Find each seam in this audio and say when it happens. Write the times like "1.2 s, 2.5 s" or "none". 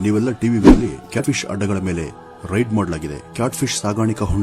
1.2 s